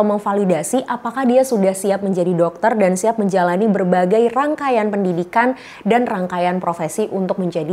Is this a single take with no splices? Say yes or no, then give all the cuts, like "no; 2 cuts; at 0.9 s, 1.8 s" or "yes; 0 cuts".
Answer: yes; 0 cuts